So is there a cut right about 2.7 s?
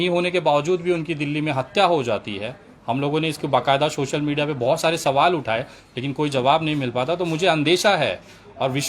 no; 0 cuts

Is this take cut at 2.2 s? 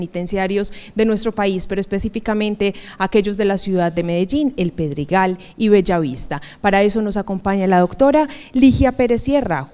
no; 1 cut; at 5.9 s

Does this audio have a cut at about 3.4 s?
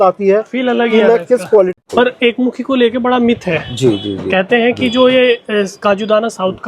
no; 1 cut; at 1.8 s

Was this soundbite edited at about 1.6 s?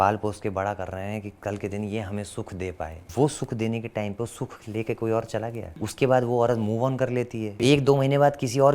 no; 3 cuts; at 3.1 s, 5.7 s, 7.6 s

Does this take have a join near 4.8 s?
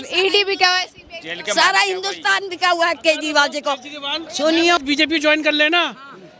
yes; 1 cut; at 4.8 s

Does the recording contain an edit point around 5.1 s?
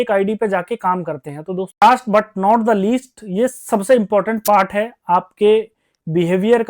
no; 1 cut; at 1.8 s

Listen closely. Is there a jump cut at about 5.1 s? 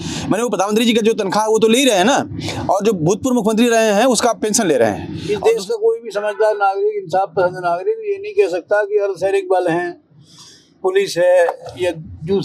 yes; 1 cut; at 5.1 s

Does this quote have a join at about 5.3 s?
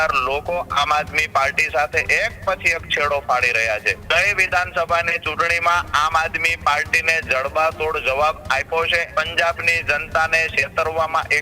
no; 2 cuts; at 3.9 s, 9.1 s

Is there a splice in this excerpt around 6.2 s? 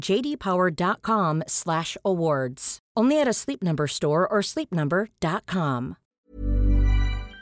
yes; 1 cut; at 6.2 s

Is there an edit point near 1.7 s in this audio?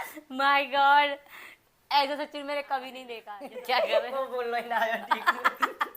no; 1 cut; at 3.3 s

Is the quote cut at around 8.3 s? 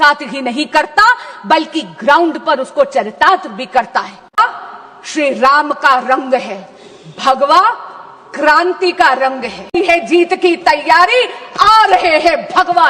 no; 2 cuts; at 4.4 s, 9.7 s

